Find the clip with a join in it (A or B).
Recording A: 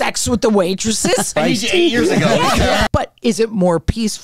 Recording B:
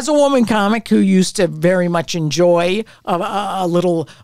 A